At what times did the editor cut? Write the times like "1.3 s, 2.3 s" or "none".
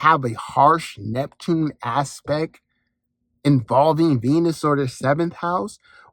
none